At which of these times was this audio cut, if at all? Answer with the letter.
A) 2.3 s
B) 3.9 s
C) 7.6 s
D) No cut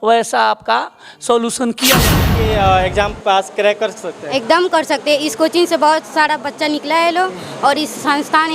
A